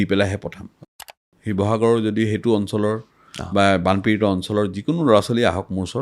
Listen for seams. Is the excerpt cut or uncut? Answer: cut